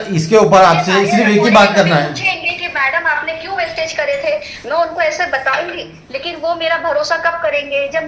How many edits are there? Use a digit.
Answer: 0